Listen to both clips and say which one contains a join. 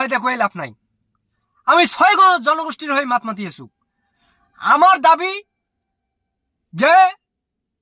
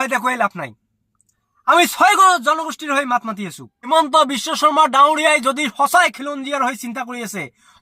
second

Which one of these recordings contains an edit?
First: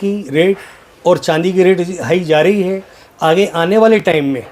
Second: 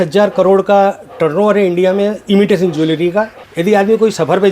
second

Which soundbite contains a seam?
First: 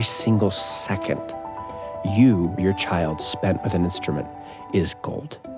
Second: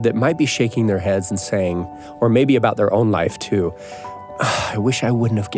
first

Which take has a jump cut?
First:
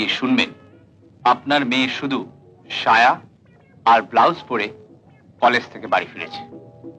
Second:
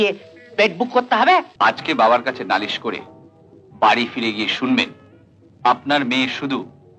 second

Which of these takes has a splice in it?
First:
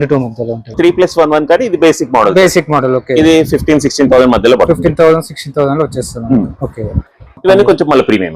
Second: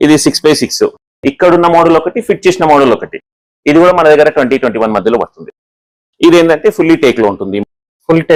first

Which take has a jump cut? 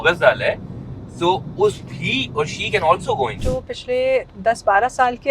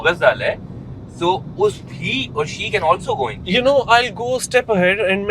first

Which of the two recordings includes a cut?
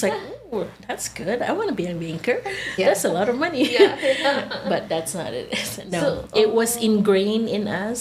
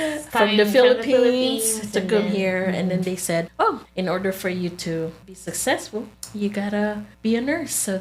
second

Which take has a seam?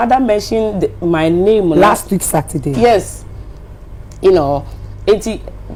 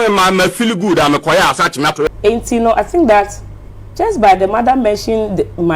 second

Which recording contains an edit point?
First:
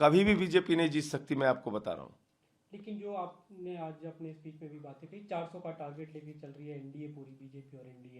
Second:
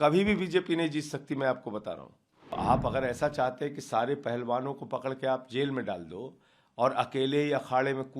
second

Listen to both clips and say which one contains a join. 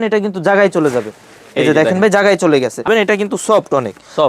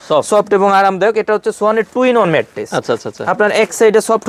first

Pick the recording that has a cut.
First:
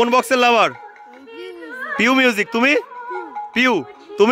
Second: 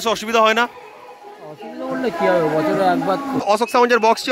second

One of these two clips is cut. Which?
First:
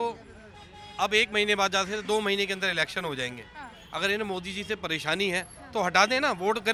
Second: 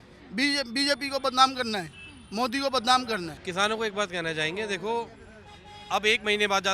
second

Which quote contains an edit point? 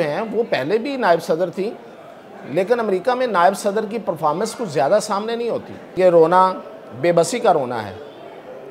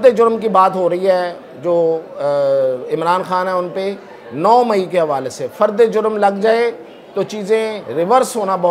first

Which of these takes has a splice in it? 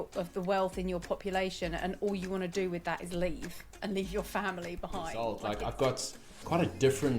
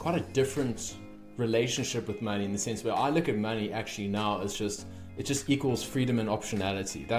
first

